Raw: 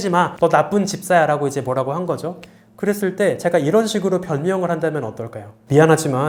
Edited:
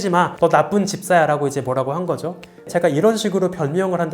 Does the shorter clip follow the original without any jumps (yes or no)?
no